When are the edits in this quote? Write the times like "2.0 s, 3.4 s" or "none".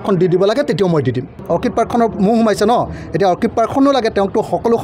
1.4 s